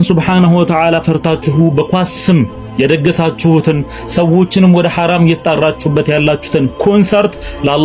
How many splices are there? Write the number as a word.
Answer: zero